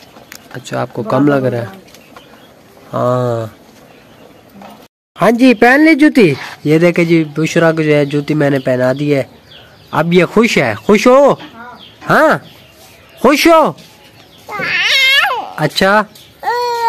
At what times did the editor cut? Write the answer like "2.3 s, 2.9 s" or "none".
4.8 s